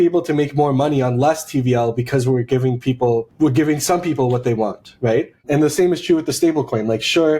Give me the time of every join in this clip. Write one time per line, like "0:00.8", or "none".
0:03.3
0:05.4